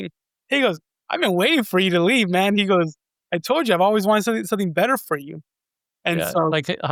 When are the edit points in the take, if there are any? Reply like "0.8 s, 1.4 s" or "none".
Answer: none